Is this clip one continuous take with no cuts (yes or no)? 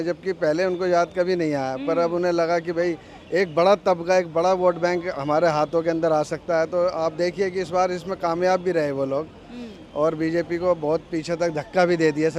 yes